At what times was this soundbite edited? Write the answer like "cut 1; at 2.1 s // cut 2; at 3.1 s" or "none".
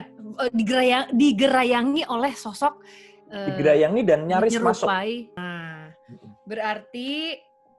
cut 1; at 5.4 s